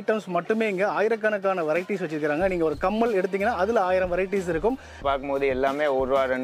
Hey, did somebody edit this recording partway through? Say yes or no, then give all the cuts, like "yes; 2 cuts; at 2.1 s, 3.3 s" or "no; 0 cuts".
yes; 1 cut; at 5.0 s